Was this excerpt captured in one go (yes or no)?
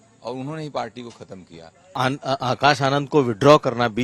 no